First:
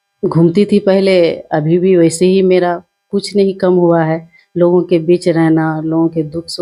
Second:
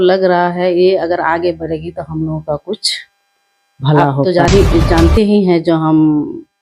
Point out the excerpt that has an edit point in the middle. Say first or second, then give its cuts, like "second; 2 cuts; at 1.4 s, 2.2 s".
second; 1 cut; at 4.2 s